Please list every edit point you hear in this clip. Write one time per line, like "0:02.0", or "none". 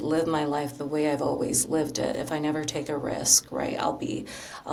none